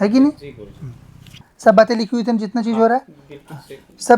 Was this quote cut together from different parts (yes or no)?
yes